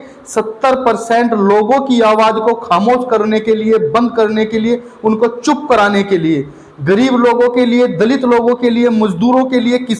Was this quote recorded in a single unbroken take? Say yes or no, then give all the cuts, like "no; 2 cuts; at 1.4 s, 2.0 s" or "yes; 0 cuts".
yes; 0 cuts